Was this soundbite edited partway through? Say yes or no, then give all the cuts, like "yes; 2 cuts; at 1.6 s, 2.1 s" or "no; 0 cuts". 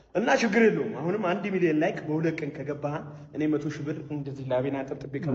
no; 0 cuts